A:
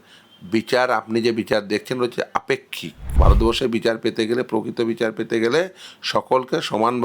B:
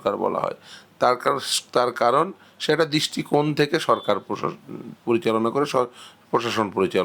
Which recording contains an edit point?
A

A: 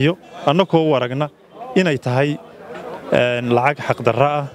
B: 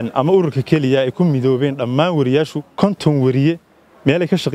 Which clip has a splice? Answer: B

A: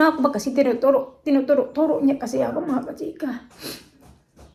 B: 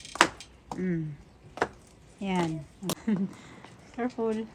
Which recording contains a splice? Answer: B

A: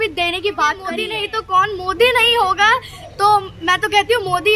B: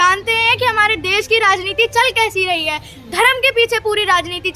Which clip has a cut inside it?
A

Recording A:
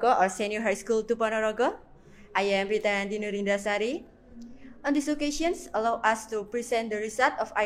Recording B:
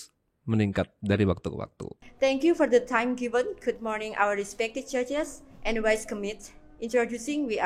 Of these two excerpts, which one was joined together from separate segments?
B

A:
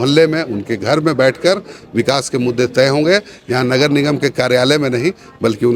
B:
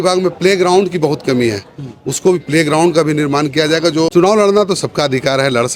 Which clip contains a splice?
B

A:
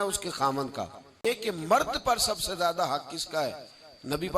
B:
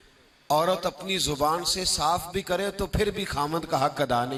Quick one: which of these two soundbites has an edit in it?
A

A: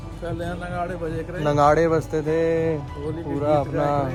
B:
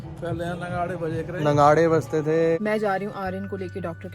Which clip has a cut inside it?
B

